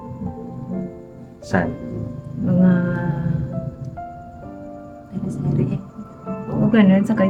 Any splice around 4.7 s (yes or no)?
no